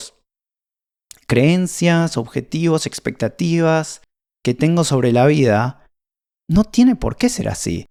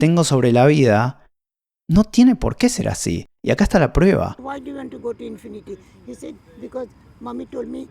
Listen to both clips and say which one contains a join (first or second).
second